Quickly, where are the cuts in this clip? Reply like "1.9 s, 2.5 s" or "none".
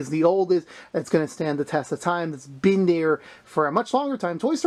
none